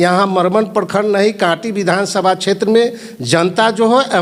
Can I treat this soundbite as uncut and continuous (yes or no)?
yes